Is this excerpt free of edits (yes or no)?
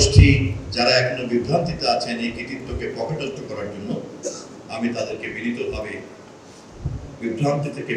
yes